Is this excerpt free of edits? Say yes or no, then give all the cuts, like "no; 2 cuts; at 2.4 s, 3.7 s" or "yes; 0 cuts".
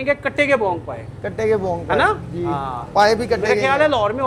yes; 0 cuts